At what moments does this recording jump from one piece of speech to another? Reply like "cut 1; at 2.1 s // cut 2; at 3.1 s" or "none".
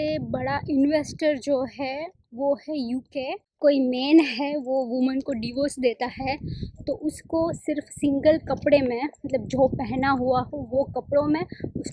cut 1; at 3.4 s